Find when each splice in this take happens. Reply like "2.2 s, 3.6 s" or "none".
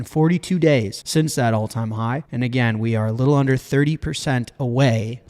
1.0 s, 2.3 s